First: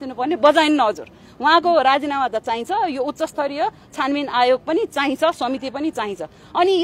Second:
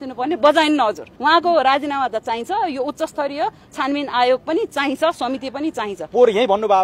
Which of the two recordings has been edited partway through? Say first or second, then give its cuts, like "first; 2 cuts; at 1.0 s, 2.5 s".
second; 2 cuts; at 1.1 s, 6.0 s